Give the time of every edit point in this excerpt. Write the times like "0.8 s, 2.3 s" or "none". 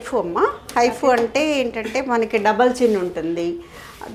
none